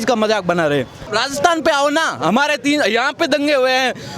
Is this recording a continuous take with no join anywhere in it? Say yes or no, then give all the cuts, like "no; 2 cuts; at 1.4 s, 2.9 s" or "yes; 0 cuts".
no; 1 cut; at 1.1 s